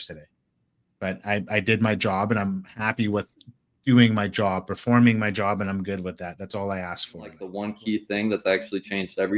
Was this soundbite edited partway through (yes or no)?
yes